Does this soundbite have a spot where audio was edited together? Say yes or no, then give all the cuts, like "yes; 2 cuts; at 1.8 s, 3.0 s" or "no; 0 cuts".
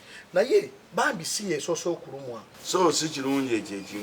yes; 1 cut; at 2.5 s